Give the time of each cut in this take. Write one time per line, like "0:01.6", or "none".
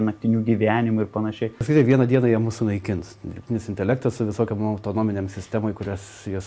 0:01.6